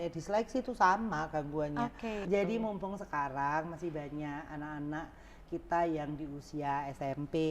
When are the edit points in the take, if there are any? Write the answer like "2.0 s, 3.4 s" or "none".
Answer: 2.2 s